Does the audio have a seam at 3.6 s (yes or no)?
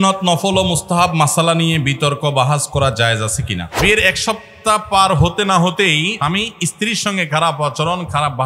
yes